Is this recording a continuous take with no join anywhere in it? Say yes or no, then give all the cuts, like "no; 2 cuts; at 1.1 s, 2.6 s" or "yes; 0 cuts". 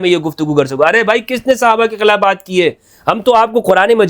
yes; 0 cuts